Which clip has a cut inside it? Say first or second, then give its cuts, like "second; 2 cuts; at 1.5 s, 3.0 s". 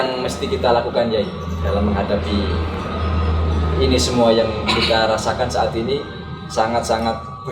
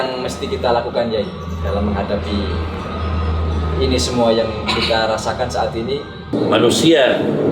second; 1 cut; at 6.3 s